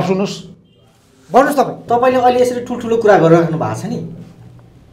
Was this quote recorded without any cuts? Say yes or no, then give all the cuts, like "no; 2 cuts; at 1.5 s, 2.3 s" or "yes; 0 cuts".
no; 1 cut; at 1.8 s